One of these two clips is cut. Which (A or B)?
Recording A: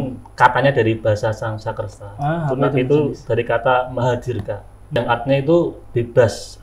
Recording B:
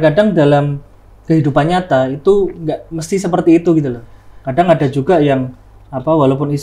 A